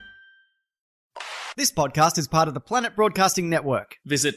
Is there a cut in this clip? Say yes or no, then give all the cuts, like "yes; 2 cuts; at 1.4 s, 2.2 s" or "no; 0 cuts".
yes; 1 cut; at 1.0 s